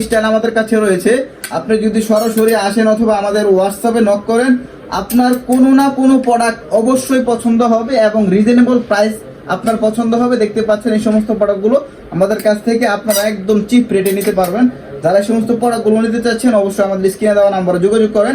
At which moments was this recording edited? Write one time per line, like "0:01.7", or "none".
none